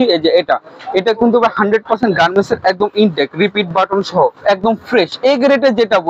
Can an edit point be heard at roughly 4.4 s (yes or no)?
yes